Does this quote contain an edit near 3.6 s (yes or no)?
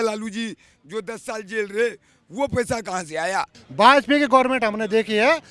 yes